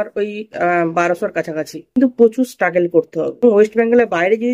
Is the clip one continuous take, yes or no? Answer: no